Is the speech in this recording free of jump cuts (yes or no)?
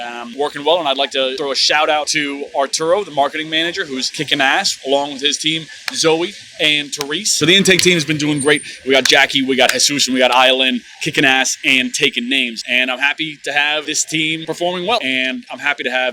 yes